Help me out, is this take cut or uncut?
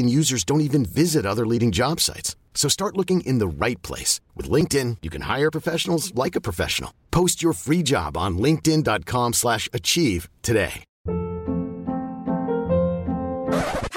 cut